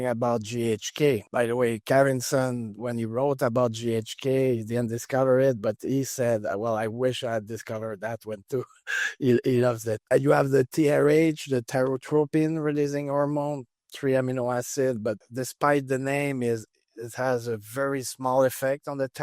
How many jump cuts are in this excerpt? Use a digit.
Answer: 1